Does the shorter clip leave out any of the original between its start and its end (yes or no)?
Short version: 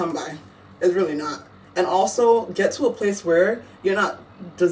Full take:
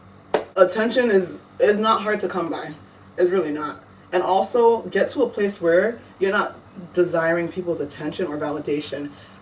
no